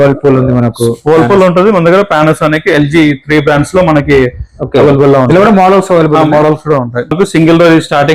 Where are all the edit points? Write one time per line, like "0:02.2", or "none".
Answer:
0:07.1